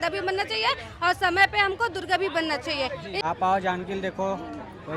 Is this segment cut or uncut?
cut